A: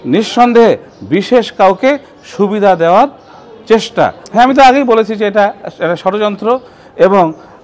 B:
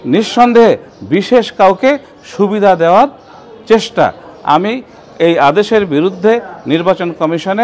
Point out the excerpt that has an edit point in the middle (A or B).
A